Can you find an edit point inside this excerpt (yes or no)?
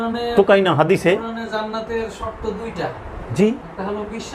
no